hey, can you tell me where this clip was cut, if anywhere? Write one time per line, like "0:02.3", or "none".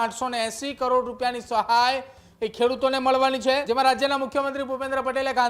0:03.6